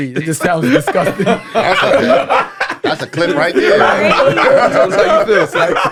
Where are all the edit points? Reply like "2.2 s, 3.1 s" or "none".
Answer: none